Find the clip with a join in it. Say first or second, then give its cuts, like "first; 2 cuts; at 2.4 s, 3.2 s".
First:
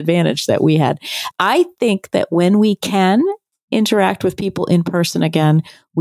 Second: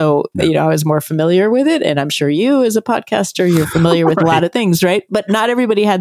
first; 1 cut; at 1.1 s